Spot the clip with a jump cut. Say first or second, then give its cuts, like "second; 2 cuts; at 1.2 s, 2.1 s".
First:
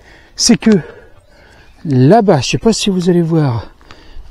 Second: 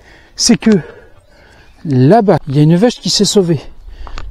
second; 1 cut; at 2.5 s